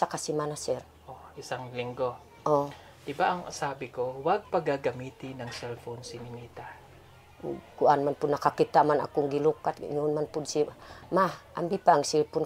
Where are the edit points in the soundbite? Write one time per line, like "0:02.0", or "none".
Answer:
none